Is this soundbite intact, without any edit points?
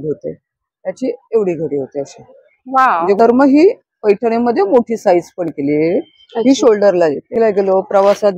no; 2 cuts; at 3.2 s, 7.3 s

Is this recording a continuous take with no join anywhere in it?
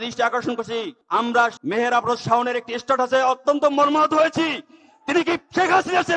no; 1 cut; at 1.2 s

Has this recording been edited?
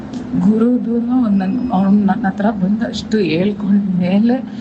no; 0 cuts

